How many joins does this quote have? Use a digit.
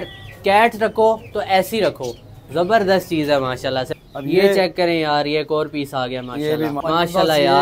2